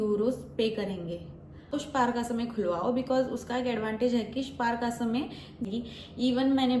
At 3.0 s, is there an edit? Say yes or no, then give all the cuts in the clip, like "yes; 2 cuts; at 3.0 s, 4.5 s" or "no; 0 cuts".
no; 2 cuts; at 1.7 s, 5.7 s